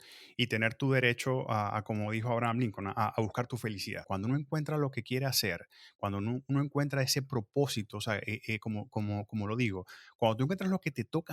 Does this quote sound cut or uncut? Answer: cut